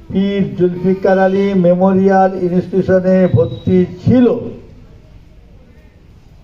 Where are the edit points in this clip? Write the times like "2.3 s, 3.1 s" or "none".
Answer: none